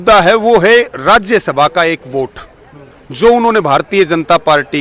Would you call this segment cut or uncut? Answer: uncut